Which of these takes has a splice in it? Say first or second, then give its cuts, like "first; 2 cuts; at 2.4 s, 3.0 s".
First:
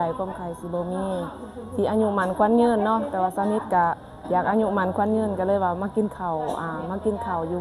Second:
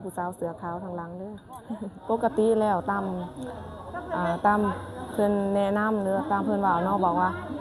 second; 1 cut; at 2.1 s